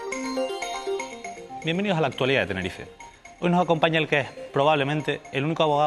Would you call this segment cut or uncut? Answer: uncut